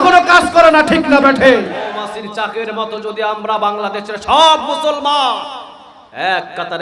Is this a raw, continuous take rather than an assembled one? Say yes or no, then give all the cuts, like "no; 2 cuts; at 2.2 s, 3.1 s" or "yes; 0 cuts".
no; 1 cut; at 1.9 s